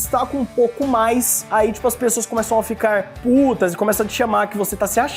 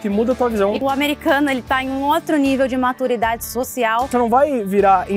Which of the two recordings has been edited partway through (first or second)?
second